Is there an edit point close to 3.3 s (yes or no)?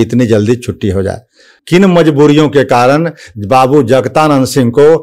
no